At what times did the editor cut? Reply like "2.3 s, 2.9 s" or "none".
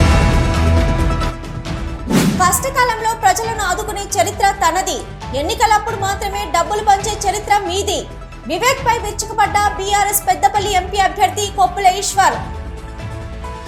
2.3 s